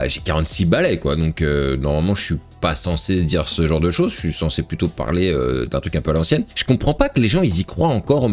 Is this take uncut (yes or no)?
yes